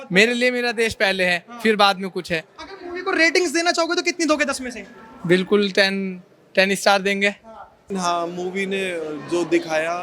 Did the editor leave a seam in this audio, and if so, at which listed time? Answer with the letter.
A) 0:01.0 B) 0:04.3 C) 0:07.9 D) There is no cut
C